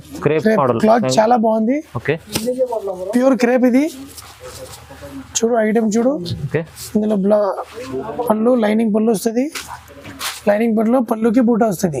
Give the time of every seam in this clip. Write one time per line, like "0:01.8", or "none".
none